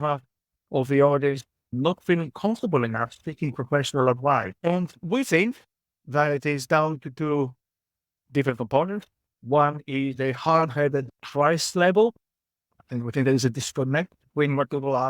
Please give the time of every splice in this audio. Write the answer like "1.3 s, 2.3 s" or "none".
1.7 s, 4.5 s

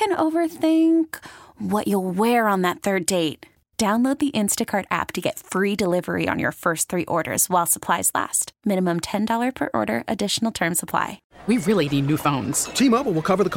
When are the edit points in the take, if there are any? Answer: 11.3 s

